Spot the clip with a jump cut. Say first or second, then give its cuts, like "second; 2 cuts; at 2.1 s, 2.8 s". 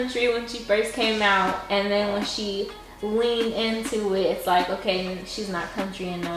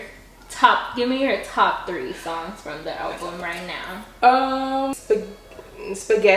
second; 1 cut; at 4.9 s